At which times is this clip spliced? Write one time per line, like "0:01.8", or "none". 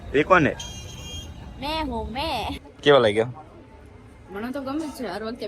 0:02.7